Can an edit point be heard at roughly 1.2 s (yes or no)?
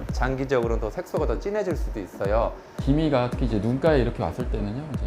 no